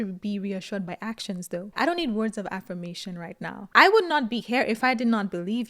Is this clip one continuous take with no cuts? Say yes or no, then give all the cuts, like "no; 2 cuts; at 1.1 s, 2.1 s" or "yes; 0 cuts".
no; 2 cuts; at 1.7 s, 3.6 s